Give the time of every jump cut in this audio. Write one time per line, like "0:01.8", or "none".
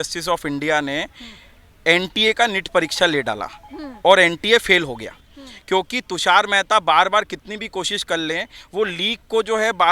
none